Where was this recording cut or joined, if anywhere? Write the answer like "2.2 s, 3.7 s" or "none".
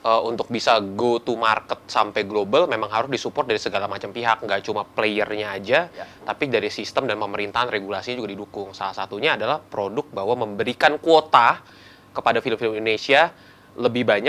none